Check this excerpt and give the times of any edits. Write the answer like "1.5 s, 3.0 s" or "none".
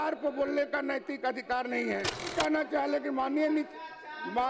2.3 s